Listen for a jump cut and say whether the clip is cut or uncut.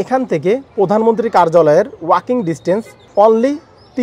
cut